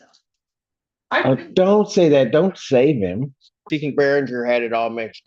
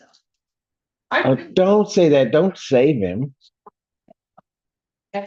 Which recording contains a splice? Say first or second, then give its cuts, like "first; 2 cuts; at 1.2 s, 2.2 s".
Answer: first; 1 cut; at 3.6 s